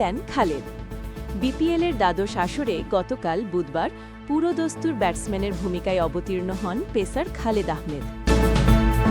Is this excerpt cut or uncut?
cut